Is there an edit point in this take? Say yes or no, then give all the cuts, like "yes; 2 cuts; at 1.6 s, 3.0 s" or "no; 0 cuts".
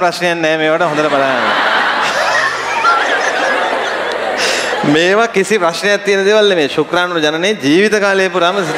no; 0 cuts